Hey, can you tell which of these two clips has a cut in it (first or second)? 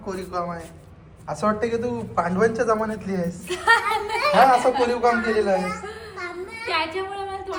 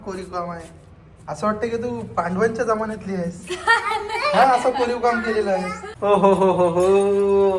second